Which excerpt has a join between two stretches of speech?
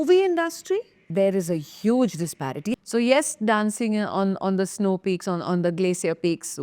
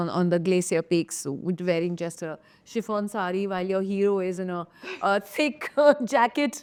first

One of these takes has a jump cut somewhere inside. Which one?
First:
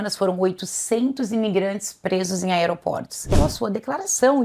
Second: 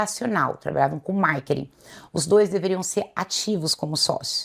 first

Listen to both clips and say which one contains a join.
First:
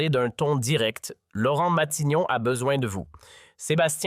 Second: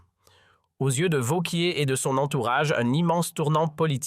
first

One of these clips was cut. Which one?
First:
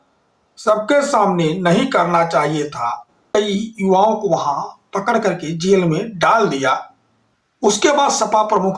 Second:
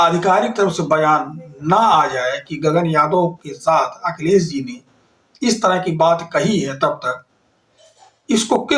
first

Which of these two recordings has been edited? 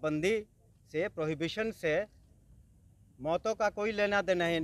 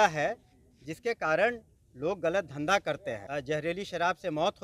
second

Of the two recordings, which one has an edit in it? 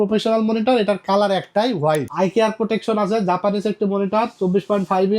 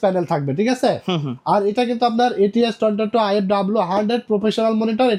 first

